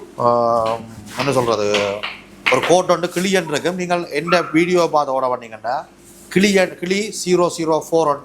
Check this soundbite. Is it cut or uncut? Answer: uncut